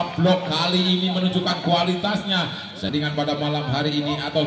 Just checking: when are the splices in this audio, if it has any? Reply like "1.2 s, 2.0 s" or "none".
2.9 s